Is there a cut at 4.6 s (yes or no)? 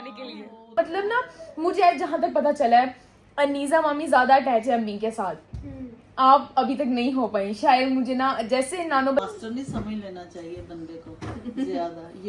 no